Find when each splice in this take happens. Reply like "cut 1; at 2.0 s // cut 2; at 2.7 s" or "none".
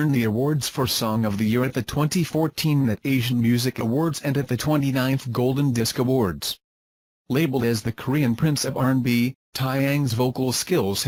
none